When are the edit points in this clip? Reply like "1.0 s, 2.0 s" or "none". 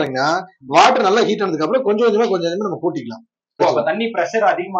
3.6 s